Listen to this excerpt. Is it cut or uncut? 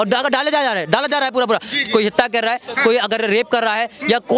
uncut